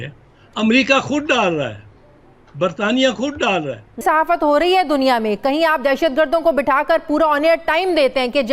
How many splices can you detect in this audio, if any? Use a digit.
1